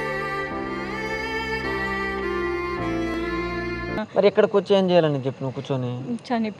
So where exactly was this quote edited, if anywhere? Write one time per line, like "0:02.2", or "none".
0:03.9